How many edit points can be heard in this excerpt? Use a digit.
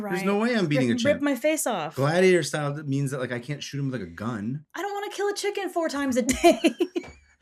1